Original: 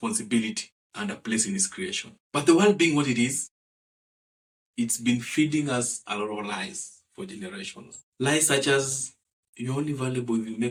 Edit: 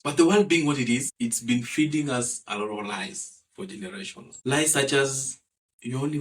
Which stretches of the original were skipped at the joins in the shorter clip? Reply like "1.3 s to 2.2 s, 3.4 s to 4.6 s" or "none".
3.7 s to 5.0 s, 7.9 s to 8.0 s